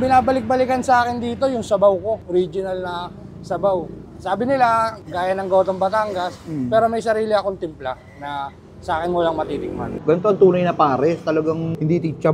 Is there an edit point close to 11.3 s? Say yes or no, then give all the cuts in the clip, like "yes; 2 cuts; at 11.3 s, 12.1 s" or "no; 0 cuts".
no; 1 cut; at 10.0 s